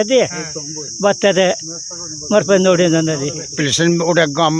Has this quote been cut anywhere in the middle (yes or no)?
yes